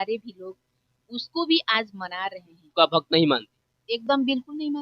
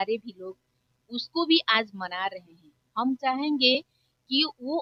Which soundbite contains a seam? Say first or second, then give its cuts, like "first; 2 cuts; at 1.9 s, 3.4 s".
first; 1 cut; at 2.7 s